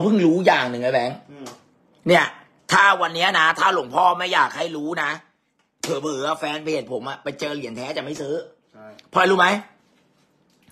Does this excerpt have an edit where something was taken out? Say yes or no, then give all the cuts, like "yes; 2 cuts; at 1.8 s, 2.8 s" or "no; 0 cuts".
no; 0 cuts